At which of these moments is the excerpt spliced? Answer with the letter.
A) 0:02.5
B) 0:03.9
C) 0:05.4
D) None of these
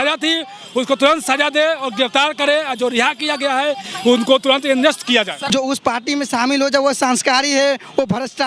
C